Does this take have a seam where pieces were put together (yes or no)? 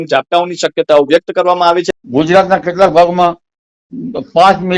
yes